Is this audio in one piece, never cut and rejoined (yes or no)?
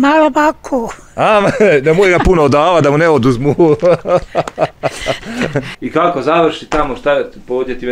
no